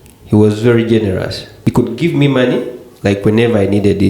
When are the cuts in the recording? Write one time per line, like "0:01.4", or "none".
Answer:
0:01.5